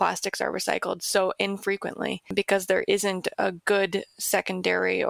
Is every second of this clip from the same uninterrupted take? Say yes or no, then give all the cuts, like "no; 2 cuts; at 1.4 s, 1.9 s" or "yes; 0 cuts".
yes; 0 cuts